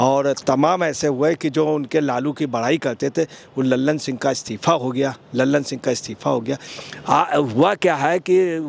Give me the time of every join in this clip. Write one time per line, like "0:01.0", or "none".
0:06.7